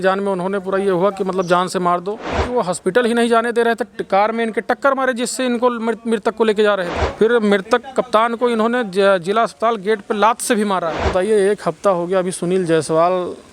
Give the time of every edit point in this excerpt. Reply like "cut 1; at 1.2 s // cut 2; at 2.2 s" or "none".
cut 1; at 2.4 s // cut 2; at 7.0 s // cut 3; at 11.1 s